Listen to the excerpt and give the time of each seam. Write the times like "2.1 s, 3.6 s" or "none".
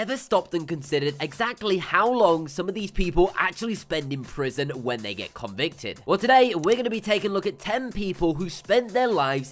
5.9 s